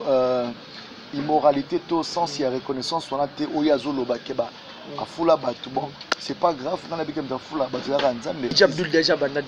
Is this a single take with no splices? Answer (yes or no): no